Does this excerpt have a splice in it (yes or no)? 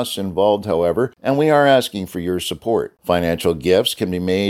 yes